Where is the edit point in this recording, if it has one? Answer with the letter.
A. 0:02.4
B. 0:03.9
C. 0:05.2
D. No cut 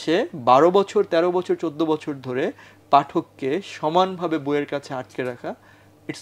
D